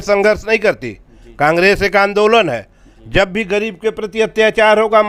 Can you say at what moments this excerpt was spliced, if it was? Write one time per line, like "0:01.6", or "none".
none